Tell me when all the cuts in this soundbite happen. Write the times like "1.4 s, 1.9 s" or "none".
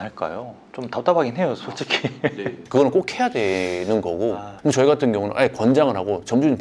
none